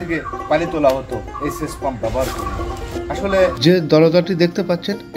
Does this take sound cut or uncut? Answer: cut